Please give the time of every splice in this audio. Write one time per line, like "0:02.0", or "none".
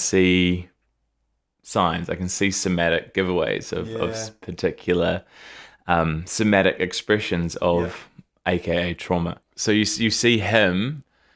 0:09.5